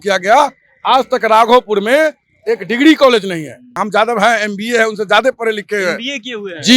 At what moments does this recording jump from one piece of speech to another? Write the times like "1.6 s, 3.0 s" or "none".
3.8 s